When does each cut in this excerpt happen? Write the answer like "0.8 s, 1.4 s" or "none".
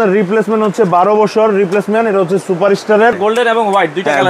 3.2 s